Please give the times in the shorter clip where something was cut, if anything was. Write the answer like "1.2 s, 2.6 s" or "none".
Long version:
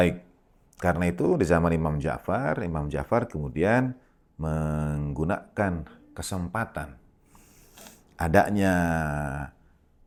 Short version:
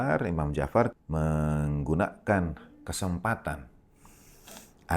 1.0 s